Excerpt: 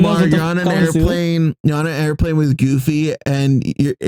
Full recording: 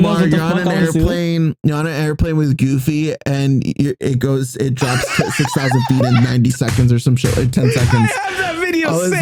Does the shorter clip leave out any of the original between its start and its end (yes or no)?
no